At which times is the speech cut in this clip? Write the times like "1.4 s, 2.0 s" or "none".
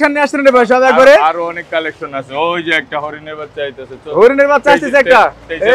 none